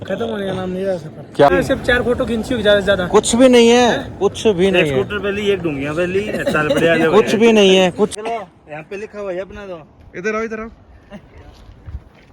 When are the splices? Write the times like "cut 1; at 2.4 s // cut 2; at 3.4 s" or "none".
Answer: cut 1; at 1.5 s // cut 2; at 8.1 s